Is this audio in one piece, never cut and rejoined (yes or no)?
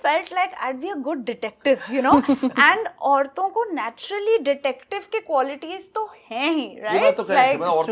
yes